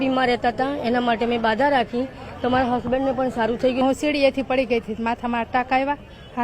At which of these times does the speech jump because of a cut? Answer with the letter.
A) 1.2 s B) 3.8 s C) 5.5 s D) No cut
B